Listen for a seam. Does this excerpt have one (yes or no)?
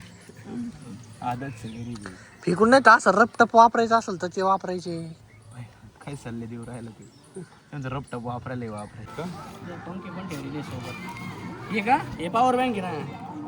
yes